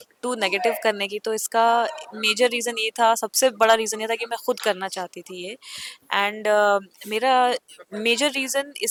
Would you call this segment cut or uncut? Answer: uncut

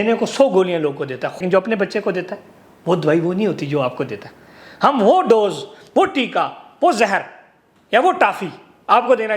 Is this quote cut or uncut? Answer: cut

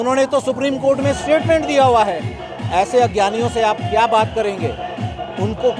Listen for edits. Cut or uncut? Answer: uncut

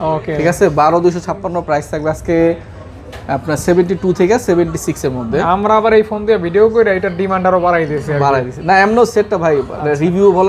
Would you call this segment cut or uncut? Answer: uncut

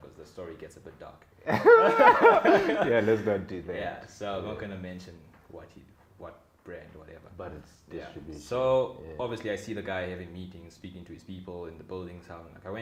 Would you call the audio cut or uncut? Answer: uncut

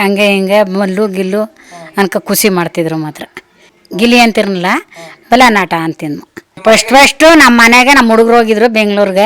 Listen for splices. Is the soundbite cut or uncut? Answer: cut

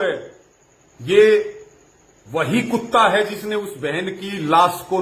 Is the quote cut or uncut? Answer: uncut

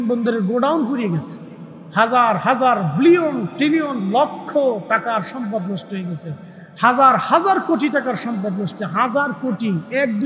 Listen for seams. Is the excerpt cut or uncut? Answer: uncut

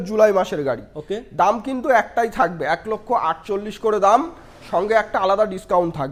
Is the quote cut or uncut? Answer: uncut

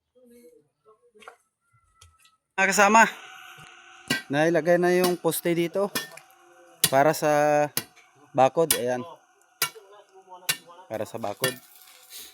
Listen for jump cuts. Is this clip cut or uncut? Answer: cut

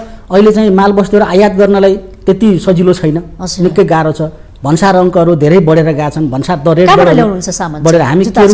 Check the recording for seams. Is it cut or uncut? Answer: uncut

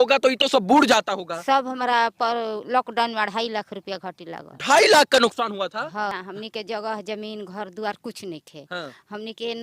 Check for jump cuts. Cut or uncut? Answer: cut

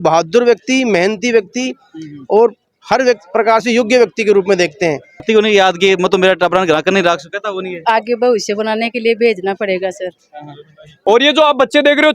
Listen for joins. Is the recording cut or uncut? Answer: cut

